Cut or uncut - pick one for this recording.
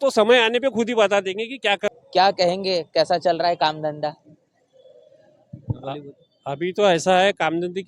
cut